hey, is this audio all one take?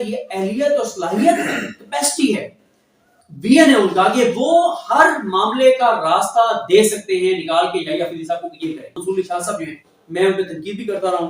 no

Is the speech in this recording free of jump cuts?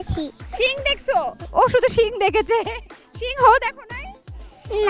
yes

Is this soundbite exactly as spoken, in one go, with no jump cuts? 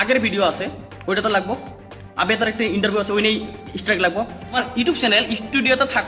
no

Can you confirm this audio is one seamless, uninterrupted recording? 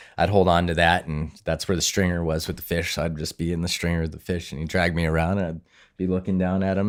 yes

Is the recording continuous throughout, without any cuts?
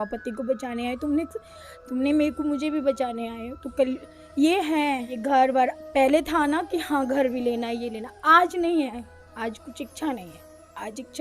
no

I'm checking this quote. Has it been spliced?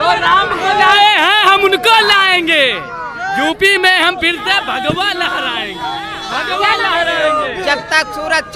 no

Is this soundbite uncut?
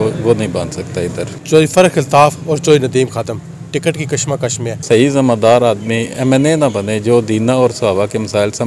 no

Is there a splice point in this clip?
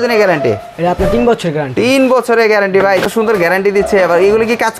yes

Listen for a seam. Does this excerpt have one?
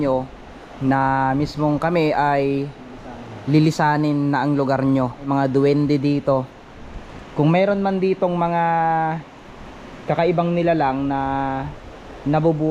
yes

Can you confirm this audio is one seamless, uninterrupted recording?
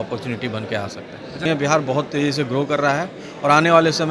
no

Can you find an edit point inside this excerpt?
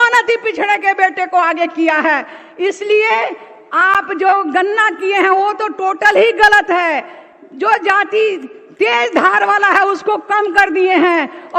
no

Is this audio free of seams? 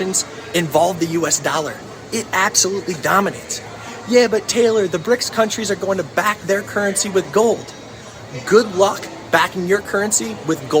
no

